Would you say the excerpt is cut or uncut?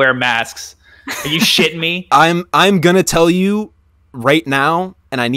uncut